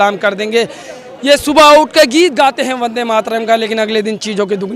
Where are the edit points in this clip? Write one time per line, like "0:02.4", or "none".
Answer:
none